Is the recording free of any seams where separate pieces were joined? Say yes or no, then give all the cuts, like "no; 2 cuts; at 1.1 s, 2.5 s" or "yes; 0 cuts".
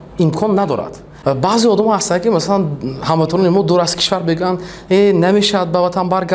no; 1 cut; at 1.0 s